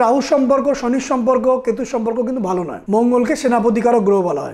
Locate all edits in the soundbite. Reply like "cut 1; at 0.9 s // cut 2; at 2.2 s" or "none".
cut 1; at 2.7 s